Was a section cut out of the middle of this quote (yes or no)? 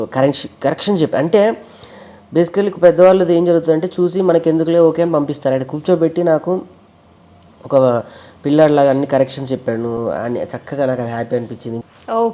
no